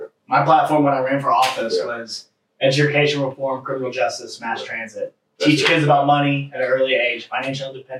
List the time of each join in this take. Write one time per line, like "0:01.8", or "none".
none